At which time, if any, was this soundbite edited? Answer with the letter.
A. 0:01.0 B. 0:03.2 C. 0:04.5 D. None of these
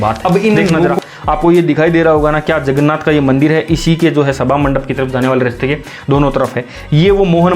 A